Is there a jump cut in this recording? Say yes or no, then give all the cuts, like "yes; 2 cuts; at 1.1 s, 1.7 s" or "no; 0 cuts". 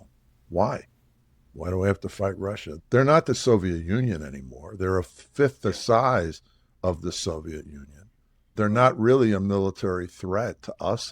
yes; 2 cuts; at 2.7 s, 8.6 s